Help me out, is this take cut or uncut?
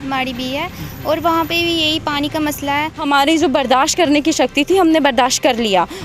cut